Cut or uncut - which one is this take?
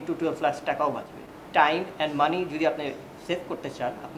cut